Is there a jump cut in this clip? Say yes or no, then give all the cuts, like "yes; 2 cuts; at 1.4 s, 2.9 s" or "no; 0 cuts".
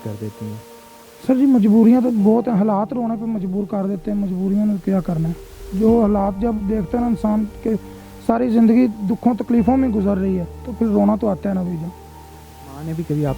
no; 0 cuts